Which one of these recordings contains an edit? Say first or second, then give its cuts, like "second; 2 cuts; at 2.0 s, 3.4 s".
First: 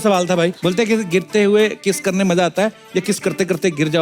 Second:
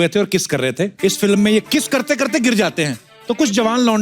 second; 2 cuts; at 0.9 s, 1.7 s